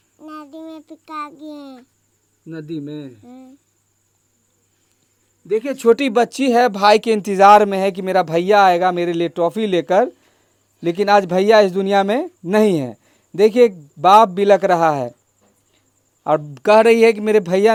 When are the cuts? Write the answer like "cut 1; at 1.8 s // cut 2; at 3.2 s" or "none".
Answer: none